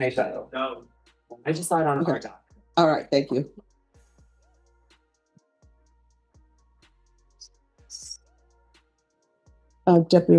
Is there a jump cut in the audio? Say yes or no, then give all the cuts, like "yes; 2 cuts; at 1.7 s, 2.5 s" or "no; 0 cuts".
no; 0 cuts